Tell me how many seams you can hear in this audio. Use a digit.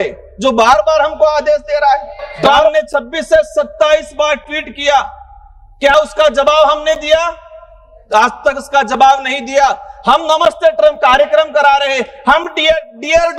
1